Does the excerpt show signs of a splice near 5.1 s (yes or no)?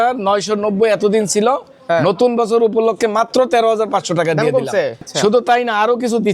yes